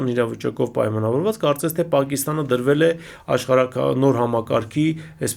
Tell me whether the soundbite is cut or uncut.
uncut